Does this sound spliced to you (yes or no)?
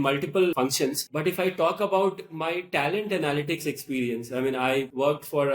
yes